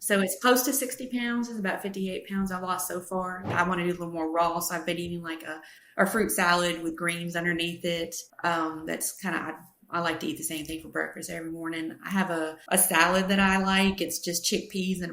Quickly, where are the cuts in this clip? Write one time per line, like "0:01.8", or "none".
0:03.5